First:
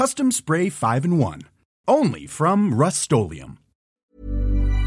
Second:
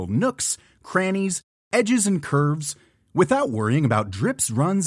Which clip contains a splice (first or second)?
first